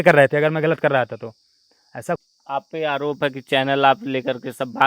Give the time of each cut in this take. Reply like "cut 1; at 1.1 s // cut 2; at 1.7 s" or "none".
cut 1; at 2.2 s